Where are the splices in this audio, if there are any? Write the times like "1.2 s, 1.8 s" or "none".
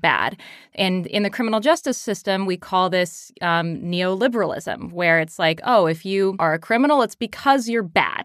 6.4 s